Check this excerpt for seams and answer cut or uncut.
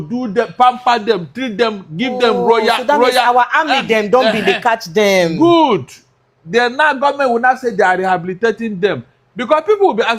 uncut